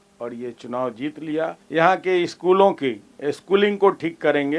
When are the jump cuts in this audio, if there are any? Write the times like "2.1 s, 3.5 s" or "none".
1.6 s